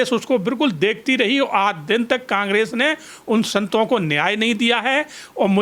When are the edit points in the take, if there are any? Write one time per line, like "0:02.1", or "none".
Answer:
none